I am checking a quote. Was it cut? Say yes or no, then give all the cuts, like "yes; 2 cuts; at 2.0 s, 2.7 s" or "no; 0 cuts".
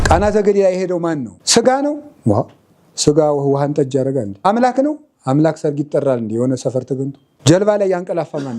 yes; 3 cuts; at 1.3 s, 4.4 s, 7.2 s